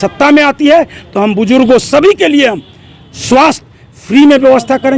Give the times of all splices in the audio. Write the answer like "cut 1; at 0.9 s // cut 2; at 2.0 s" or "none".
none

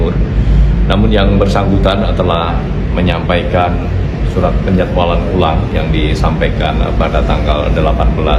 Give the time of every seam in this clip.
none

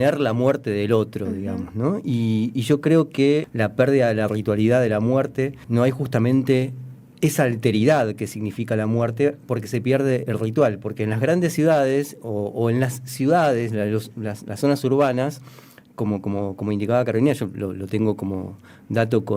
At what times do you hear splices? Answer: cut 1; at 3.5 s // cut 2; at 5.6 s

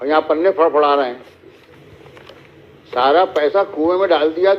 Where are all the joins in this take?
cut 1; at 1.7 s

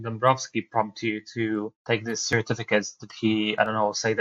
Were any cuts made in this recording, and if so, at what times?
none

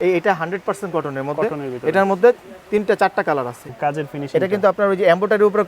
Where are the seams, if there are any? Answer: cut 1; at 3.6 s

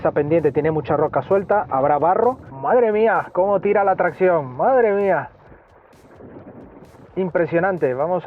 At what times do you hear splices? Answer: cut 1; at 2.5 s

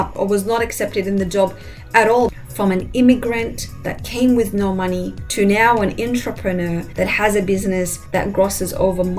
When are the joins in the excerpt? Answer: cut 1; at 2.4 s // cut 2; at 5.2 s // cut 3; at 6.9 s // cut 4; at 8.0 s

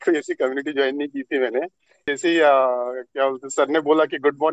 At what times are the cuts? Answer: cut 1; at 2.1 s

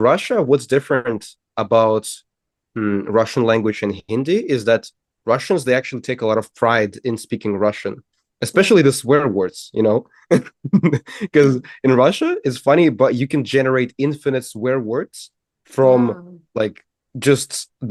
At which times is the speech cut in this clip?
none

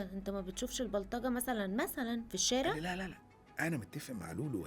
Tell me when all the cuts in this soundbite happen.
cut 1; at 2.8 s

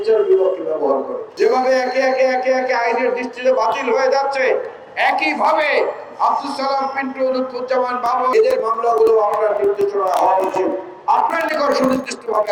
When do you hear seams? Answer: cut 1; at 1.2 s // cut 2; at 8.3 s

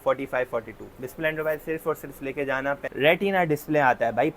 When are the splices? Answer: cut 1; at 2.9 s

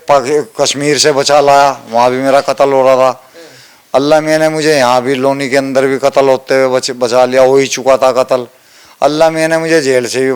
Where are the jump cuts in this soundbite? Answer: none

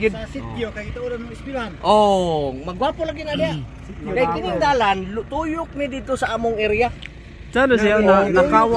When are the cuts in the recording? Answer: none

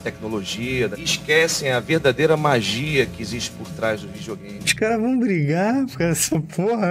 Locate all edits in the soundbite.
cut 1; at 0.9 s // cut 2; at 4.6 s

